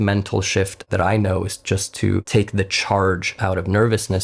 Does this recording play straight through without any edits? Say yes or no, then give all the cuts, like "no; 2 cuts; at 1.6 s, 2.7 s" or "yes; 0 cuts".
no; 2 cuts; at 0.8 s, 2.3 s